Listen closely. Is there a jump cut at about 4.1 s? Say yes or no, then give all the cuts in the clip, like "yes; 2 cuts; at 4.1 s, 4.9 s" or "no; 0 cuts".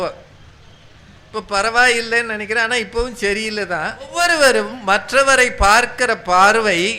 yes; 1 cut; at 4.1 s